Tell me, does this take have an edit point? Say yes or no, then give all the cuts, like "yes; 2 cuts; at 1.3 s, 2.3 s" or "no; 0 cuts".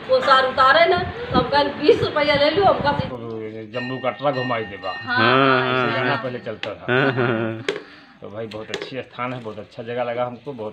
yes; 1 cut; at 3.0 s